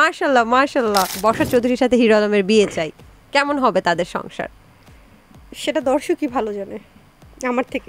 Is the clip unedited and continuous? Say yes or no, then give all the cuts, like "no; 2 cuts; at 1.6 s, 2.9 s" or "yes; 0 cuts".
no; 1 cut; at 1.1 s